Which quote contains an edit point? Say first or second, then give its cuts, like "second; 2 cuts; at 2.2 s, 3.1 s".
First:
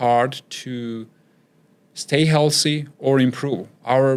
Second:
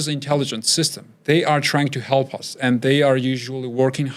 second; 1 cut; at 1.1 s